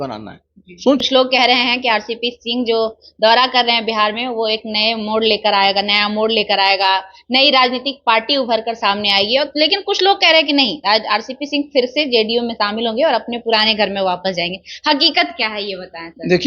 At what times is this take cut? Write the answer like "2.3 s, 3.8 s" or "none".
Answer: 1.0 s